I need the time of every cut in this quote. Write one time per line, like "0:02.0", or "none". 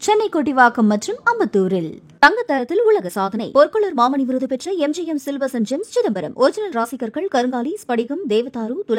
none